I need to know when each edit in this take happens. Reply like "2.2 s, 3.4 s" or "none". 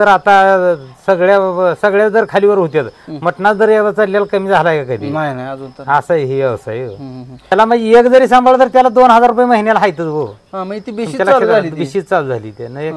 7.5 s